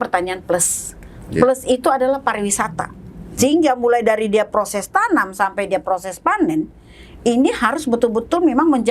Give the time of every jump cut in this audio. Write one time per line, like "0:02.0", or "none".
none